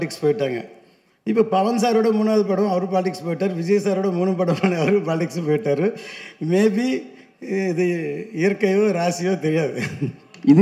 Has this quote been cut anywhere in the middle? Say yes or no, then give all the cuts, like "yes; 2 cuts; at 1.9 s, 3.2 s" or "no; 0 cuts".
no; 0 cuts